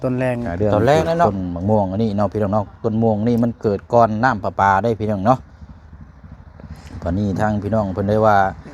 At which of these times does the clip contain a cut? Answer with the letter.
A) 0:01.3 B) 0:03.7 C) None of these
A